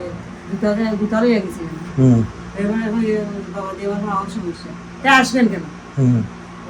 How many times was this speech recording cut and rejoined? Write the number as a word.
zero